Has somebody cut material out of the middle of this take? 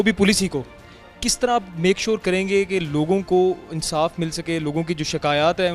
no; 0 cuts

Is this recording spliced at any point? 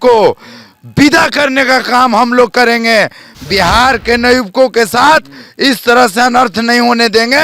no; 0 cuts

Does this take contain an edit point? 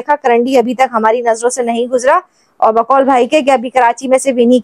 no; 0 cuts

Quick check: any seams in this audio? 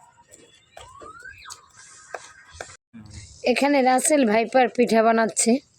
yes; 1 cut; at 2.9 s

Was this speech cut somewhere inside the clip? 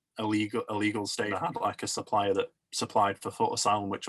yes; 1 cut; at 1.3 s

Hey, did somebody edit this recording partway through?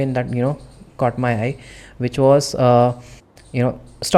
no; 0 cuts

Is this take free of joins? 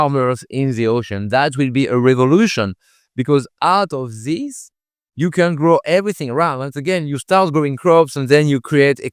yes; 0 cuts

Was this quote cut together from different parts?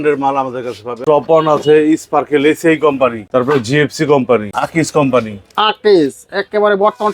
yes; 3 cuts; at 1.0 s, 3.2 s, 4.6 s

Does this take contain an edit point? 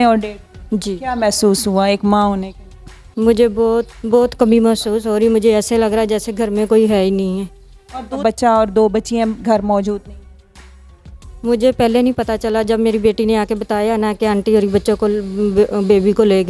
yes; 1 cut; at 8.2 s

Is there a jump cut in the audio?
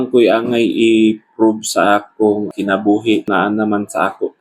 yes; 2 cuts; at 2.5 s, 3.3 s

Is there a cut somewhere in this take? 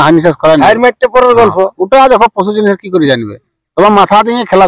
no; 0 cuts

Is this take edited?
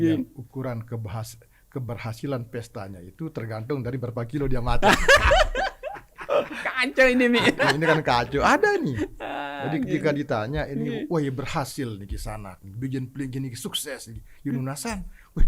no; 0 cuts

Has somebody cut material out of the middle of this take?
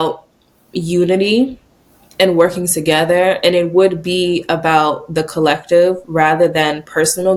no; 0 cuts

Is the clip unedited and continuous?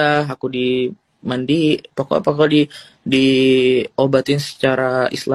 yes; 0 cuts

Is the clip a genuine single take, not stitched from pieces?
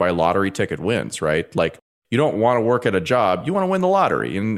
yes; 0 cuts

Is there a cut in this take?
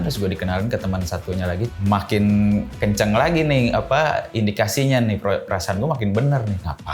yes; 1 cut; at 1.7 s

